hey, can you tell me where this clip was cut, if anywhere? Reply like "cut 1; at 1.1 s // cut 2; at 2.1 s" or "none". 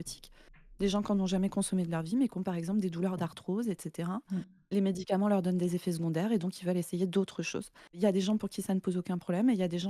none